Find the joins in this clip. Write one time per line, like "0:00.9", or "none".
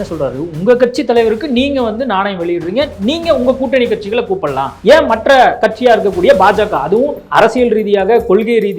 0:04.7
0:05.6
0:07.2